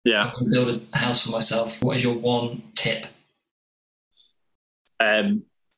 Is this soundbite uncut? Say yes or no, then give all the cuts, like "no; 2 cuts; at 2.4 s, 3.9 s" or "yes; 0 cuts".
no; 1 cut; at 1.7 s